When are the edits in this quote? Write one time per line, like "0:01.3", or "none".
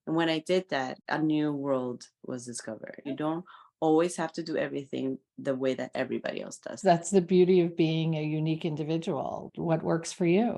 0:01.0
0:03.1
0:06.7
0:09.5